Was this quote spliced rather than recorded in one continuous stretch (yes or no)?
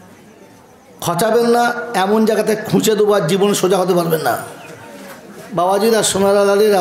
no